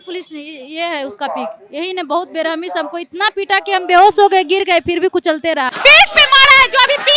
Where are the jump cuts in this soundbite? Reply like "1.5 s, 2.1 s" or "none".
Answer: 5.7 s